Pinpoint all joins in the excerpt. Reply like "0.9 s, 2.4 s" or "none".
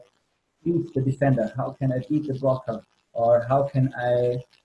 none